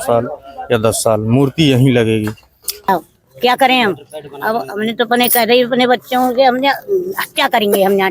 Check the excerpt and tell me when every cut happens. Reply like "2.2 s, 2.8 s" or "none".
2.9 s